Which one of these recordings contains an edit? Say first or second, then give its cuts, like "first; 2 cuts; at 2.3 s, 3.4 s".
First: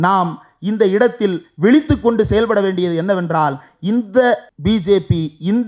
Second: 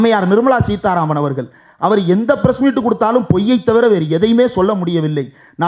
first; 1 cut; at 4.5 s